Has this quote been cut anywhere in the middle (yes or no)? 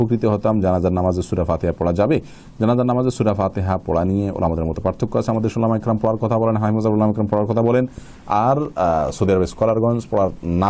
no